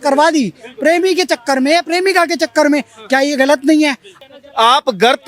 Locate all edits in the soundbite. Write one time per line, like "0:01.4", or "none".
0:04.1